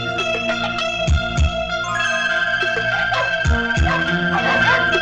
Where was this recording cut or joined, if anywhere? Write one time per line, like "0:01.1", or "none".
none